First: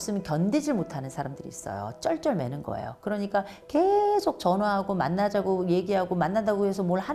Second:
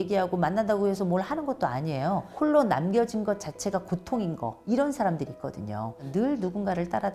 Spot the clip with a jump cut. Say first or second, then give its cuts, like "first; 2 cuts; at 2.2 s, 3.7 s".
second; 2 cuts; at 2.3 s, 6.0 s